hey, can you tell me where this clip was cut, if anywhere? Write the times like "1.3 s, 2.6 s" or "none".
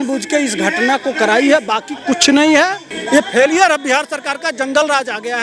2.9 s